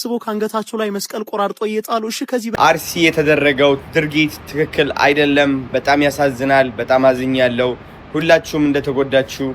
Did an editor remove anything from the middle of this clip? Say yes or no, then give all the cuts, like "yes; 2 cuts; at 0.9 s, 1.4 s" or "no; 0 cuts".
yes; 1 cut; at 2.5 s